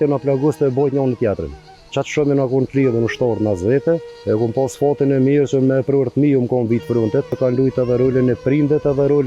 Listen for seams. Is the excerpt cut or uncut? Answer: cut